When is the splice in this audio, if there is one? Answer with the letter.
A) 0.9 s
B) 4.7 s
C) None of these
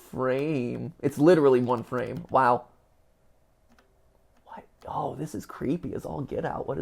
C